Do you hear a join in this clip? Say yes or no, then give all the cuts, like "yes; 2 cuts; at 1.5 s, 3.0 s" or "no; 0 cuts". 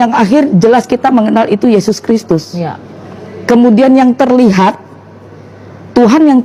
no; 0 cuts